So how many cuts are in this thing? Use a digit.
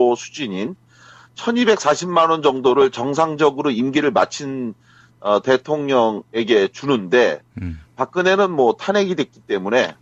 1